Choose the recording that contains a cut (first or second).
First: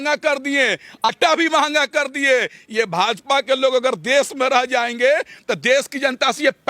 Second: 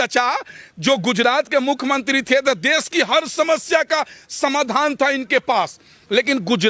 first